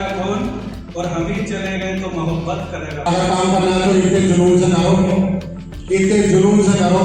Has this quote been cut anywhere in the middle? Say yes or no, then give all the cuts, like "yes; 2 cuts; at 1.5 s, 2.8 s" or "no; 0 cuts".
yes; 1 cut; at 3.0 s